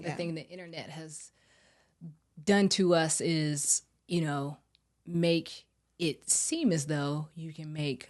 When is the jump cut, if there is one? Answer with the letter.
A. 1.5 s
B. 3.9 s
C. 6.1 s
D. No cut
D